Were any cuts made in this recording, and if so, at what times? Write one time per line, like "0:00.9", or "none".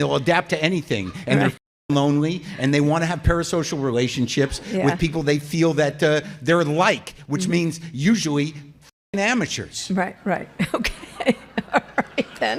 none